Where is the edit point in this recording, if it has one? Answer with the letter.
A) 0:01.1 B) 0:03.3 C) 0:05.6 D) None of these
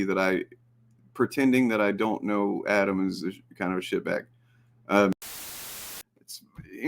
C